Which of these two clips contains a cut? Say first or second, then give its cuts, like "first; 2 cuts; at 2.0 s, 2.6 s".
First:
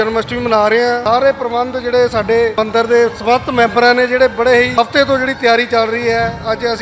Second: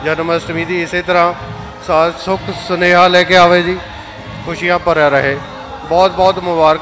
first; 3 cuts; at 1.0 s, 2.5 s, 4.7 s